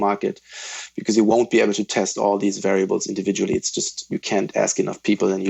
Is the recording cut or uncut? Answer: uncut